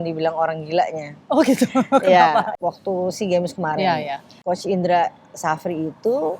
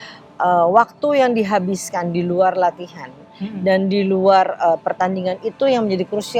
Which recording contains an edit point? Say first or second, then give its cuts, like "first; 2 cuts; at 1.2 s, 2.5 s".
first; 2 cuts; at 2.5 s, 4.4 s